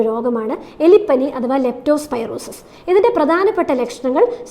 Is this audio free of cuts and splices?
yes; 0 cuts

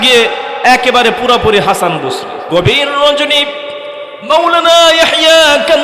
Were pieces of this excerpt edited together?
yes; 1 cut; at 2.4 s

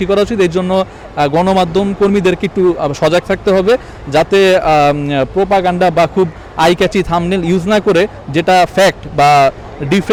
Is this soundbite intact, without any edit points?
yes; 0 cuts

